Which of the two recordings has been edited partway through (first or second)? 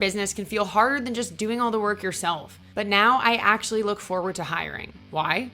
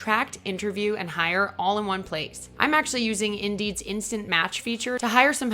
second